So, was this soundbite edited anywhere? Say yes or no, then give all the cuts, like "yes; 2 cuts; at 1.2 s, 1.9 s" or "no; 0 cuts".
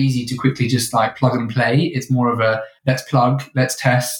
yes; 1 cut; at 1.1 s